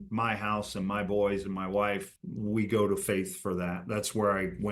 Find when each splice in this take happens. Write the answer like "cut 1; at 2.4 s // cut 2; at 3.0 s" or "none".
cut 1; at 2.1 s